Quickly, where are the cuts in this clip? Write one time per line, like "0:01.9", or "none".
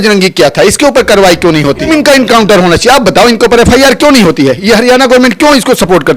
0:01.9